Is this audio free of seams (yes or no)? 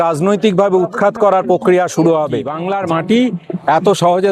no